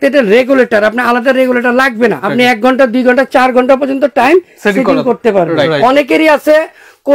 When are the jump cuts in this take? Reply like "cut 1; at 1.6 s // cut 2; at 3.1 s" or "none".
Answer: cut 1; at 2.2 s // cut 2; at 5.7 s